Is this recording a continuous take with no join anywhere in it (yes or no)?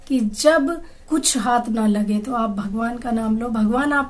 no